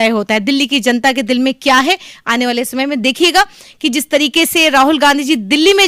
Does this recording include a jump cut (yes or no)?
no